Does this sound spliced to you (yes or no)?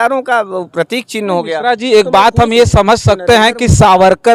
no